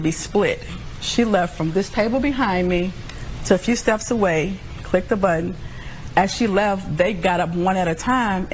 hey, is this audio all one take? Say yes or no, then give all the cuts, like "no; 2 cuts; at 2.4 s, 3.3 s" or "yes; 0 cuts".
yes; 0 cuts